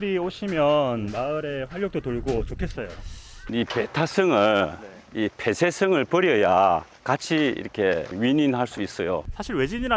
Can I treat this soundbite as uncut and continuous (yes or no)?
yes